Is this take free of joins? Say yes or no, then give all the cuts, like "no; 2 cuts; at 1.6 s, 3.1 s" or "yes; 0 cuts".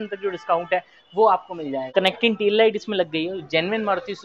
no; 1 cut; at 1.8 s